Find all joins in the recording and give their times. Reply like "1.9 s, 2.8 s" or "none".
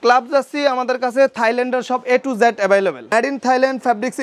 3.0 s